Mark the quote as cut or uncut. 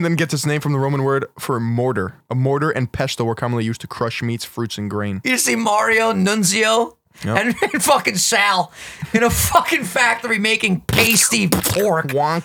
cut